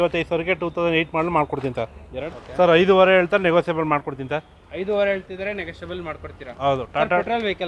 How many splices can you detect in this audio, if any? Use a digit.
1